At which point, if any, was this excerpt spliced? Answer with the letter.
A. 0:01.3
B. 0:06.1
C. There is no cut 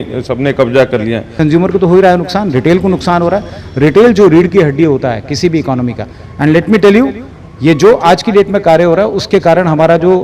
A